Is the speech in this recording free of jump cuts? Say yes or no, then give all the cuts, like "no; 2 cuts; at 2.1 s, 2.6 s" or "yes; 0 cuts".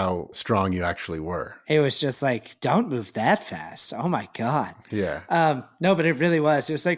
yes; 0 cuts